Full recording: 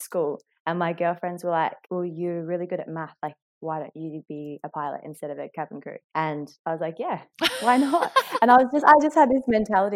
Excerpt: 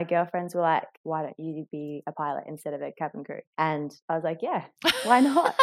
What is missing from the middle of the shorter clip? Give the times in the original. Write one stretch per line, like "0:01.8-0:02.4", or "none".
0:01.8-0:03.5